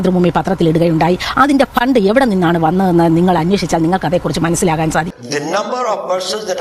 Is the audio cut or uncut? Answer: cut